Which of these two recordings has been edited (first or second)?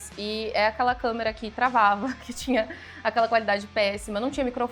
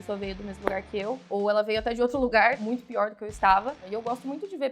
second